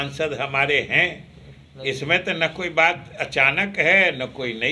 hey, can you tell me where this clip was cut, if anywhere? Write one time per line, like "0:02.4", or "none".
none